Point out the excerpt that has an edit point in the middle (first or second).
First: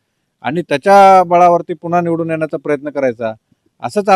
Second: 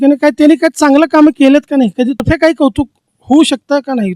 second